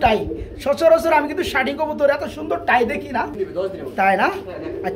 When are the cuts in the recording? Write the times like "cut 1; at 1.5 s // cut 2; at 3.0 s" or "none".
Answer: cut 1; at 3.4 s